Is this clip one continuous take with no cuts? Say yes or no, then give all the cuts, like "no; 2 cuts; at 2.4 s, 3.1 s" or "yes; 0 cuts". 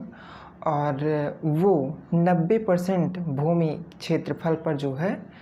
yes; 0 cuts